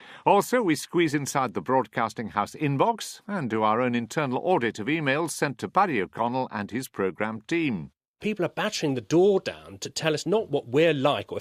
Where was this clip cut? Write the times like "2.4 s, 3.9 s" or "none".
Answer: 4.2 s